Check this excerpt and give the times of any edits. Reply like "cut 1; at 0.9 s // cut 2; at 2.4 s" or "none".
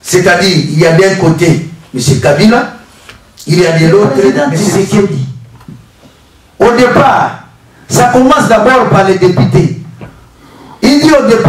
cut 1; at 4.3 s